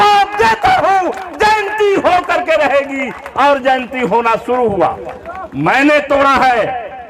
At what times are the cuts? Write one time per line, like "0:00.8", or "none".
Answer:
none